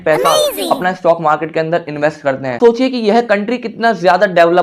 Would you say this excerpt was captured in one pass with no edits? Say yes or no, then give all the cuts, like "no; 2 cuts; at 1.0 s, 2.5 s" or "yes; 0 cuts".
no; 1 cut; at 2.6 s